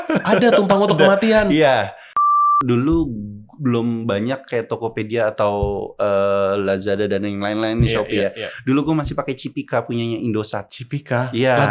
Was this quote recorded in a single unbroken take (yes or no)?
no